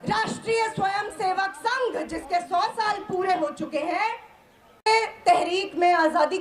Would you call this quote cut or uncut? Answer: uncut